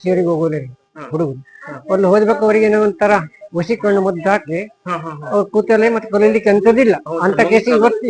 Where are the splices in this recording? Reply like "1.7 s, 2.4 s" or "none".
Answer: none

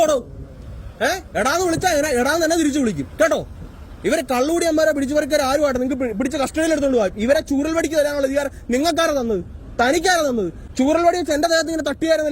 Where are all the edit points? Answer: 10.6 s

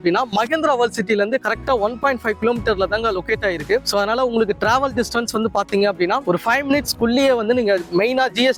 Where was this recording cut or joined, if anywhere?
none

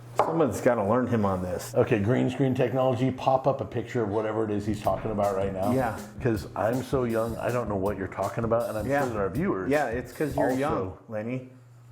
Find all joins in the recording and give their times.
1.6 s

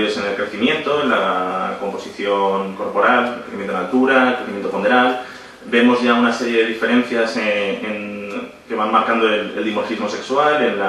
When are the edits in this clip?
8.9 s

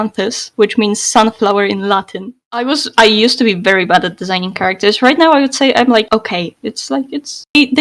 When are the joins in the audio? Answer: 2.5 s

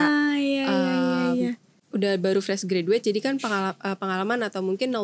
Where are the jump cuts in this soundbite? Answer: 1.7 s

